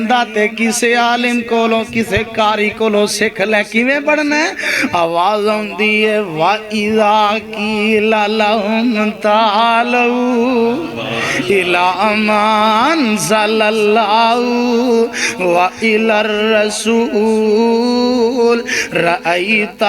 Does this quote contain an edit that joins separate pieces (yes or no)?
no